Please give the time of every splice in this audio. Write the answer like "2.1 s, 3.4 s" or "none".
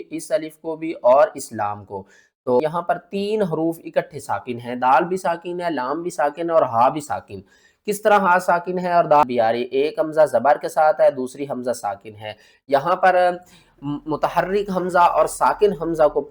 2.6 s, 9.2 s